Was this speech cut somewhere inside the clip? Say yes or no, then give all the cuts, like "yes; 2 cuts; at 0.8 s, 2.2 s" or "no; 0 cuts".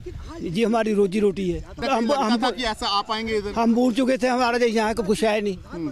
yes; 1 cut; at 1.8 s